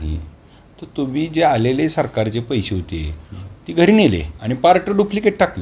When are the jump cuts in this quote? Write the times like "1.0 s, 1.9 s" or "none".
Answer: 4.4 s